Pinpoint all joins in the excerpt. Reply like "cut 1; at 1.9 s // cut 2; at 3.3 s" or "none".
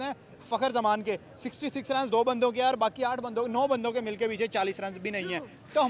none